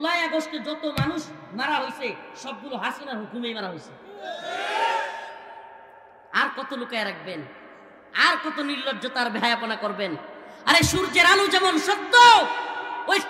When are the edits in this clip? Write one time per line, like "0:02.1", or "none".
none